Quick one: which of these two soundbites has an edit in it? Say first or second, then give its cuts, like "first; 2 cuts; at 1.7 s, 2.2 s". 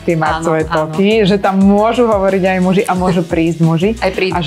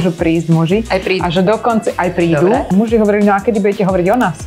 second; 1 cut; at 2.7 s